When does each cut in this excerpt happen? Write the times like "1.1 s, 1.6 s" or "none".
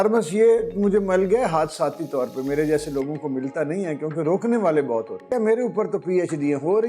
5.3 s